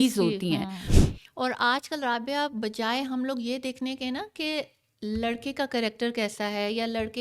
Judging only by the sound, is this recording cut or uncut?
cut